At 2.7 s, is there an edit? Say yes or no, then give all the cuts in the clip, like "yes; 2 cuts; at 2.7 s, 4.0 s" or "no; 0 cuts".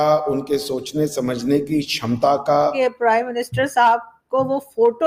yes; 1 cut; at 2.7 s